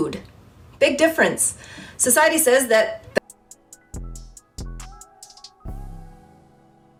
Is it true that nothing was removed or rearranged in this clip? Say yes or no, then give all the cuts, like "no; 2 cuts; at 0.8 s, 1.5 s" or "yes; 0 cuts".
yes; 0 cuts